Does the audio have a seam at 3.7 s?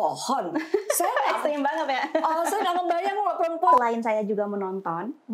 yes; 1 cut; at 3.7 s

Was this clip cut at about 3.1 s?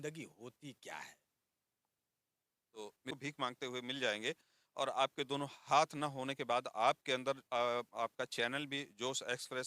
yes; 1 cut; at 3.1 s

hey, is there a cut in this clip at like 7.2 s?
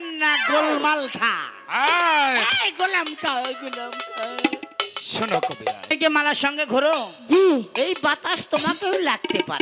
no; 1 cut; at 5.8 s

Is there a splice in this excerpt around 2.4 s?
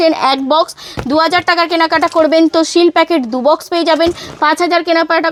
no; 0 cuts

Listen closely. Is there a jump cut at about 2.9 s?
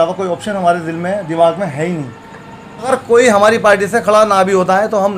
yes; 1 cut; at 2.9 s

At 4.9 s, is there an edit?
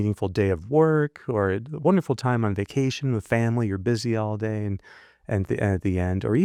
no; 0 cuts

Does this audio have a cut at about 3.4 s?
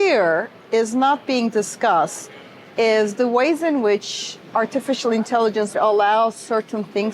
no; 1 cut; at 5.8 s

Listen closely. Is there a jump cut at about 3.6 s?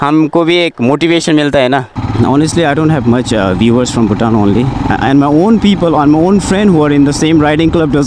no; 1 cut; at 1.9 s

